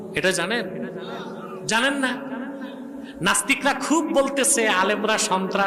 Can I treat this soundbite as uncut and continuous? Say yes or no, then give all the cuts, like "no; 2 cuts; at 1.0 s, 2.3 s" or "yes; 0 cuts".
yes; 0 cuts